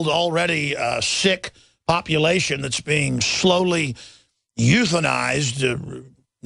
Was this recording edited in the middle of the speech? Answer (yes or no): yes